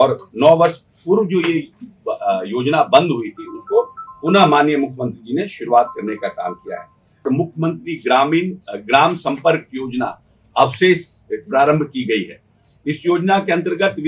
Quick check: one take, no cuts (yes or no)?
no